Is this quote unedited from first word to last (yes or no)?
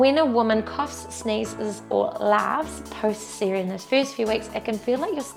yes